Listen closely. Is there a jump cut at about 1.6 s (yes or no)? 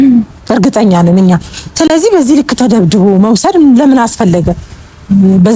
no